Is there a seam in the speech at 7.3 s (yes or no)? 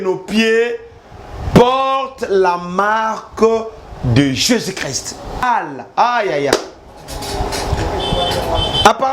no